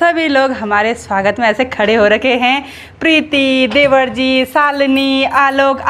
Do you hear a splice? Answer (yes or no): no